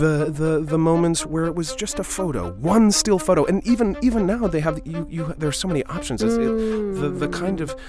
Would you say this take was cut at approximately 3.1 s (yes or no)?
no